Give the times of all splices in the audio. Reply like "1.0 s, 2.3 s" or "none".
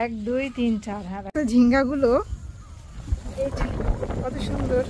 1.3 s